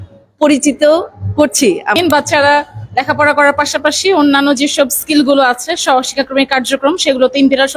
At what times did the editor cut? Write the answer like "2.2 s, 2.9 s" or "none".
2.0 s